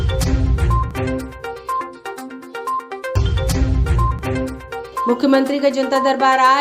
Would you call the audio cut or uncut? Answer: cut